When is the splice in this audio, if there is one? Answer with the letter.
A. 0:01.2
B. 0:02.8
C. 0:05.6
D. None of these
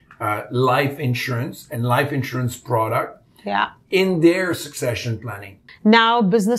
C